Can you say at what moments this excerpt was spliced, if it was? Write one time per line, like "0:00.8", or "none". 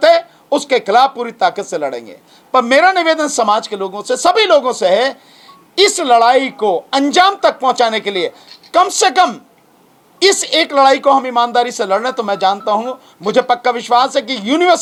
none